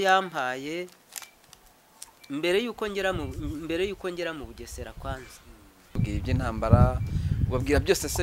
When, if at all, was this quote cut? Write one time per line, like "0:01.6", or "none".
0:06.0